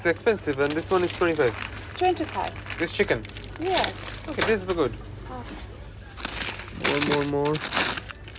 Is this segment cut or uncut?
uncut